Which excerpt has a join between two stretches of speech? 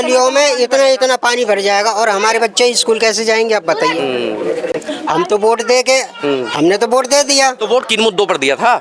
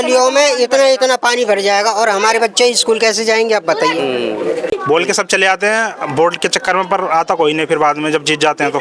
second; 1 cut; at 4.7 s

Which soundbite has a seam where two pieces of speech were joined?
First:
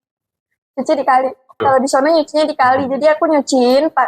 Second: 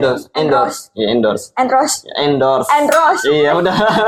first; 1 cut; at 1.6 s

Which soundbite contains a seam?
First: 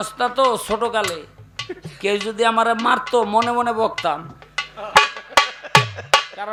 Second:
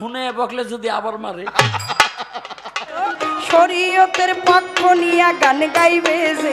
second; 1 cut; at 3.0 s

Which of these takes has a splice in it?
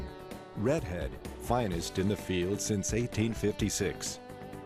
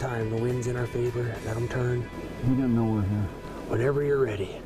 second; 2 cuts; at 2.2 s, 3.5 s

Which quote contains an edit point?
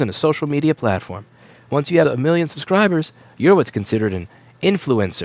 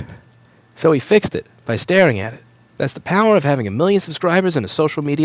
first; 1 cut; at 2.0 s

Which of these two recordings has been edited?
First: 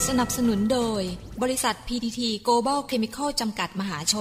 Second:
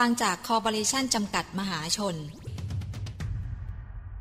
second; 1 cut; at 2.5 s

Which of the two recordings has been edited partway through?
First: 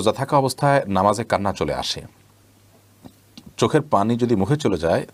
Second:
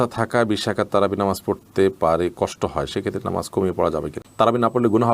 second; 1 cut; at 4.2 s

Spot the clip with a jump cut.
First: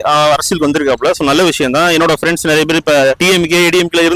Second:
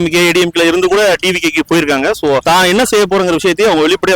second; 1 cut; at 2.4 s

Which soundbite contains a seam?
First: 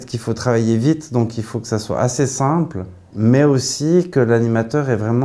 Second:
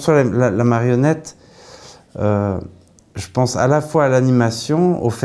first; 1 cut; at 3.0 s

